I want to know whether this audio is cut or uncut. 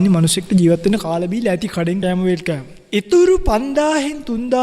cut